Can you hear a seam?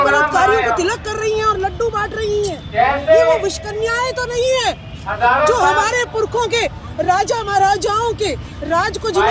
no; 0 cuts

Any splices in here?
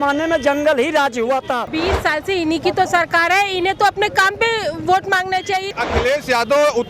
yes; 2 cuts; at 1.7 s, 5.7 s

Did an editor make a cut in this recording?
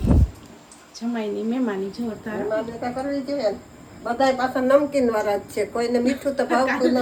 no; 0 cuts

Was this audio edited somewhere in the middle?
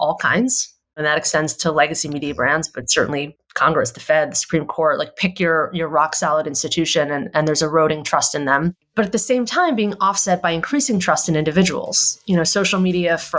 yes; 1 cut; at 1.0 s

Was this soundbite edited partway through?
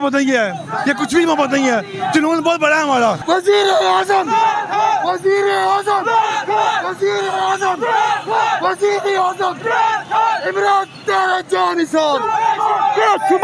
yes; 1 cut; at 3.2 s

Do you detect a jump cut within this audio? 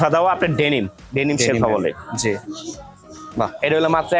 no; 0 cuts

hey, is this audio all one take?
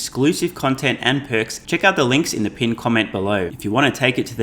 no; 2 cuts; at 1.6 s, 3.5 s

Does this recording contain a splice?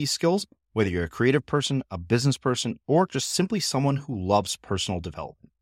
no; 0 cuts

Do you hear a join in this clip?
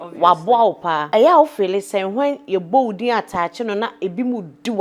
yes; 1 cut; at 1.0 s

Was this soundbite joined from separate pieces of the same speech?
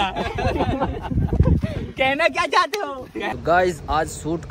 yes; 1 cut; at 3.3 s

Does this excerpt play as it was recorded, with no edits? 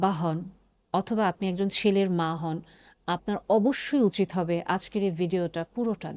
yes; 0 cuts

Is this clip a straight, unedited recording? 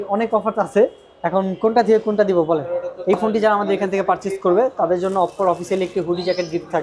yes; 0 cuts

